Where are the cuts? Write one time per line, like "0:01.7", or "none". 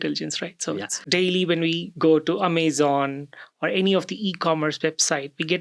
0:00.9